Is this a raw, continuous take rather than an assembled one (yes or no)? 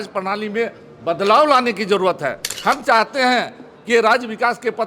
no